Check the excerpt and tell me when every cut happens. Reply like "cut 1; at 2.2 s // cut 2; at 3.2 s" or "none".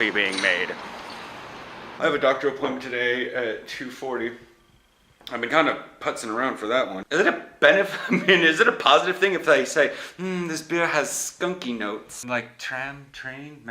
cut 1; at 1.9 s // cut 2; at 7.0 s // cut 3; at 12.1 s